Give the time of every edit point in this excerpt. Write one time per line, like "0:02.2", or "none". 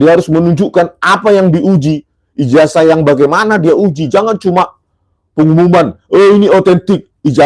none

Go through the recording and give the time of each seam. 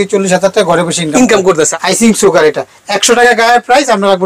0:01.8

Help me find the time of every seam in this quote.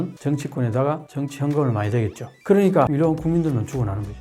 0:02.3
0:02.9

